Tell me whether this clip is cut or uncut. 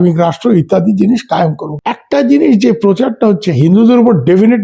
cut